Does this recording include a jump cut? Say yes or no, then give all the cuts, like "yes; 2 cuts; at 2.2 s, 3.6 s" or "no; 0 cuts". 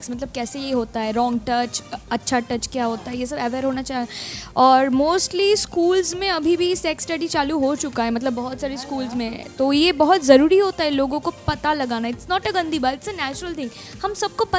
no; 0 cuts